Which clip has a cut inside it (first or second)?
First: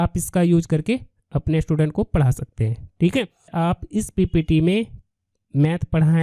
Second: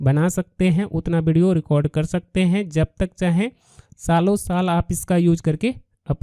first